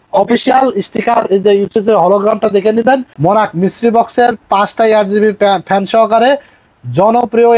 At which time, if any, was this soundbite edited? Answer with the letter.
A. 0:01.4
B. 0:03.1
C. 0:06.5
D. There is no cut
B